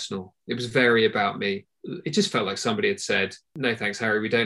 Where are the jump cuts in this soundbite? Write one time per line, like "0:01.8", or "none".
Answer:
0:01.7
0:03.4